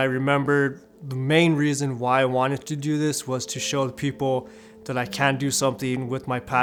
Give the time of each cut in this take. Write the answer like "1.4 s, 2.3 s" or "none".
none